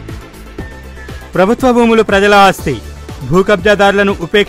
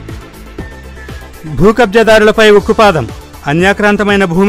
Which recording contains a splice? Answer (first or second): second